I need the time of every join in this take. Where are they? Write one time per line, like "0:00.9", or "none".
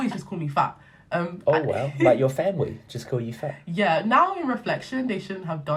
none